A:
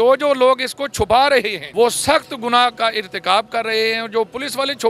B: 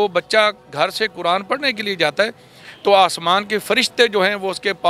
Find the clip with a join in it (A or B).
A